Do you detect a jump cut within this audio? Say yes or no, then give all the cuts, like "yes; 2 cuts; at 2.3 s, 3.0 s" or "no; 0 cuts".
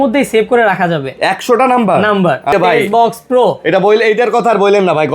yes; 1 cut; at 2.5 s